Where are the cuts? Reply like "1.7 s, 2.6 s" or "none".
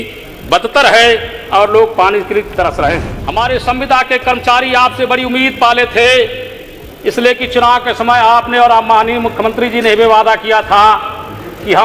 3.1 s